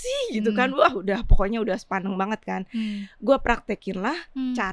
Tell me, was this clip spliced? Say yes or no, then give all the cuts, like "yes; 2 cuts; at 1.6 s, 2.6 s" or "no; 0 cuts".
no; 0 cuts